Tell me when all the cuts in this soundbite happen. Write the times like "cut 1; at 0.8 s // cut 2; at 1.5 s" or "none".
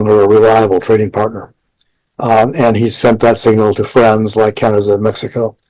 none